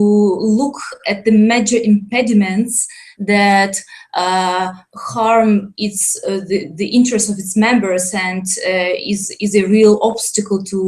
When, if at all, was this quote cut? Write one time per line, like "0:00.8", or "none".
0:09.7